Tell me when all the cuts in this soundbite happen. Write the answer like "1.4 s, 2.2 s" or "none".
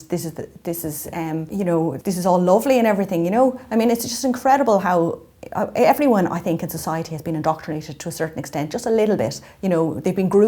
1.9 s